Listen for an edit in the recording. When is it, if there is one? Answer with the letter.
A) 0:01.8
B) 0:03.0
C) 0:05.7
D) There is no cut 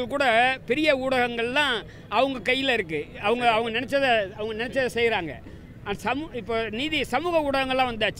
D